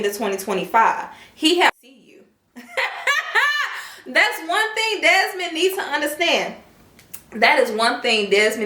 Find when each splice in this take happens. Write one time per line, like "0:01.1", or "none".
0:01.7